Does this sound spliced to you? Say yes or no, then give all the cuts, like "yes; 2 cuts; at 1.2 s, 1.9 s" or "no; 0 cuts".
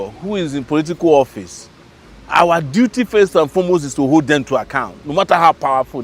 no; 0 cuts